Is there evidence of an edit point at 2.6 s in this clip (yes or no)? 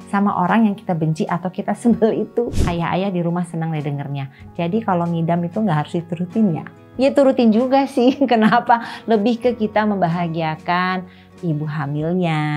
yes